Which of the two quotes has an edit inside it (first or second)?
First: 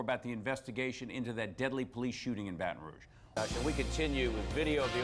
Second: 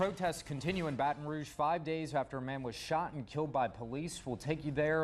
first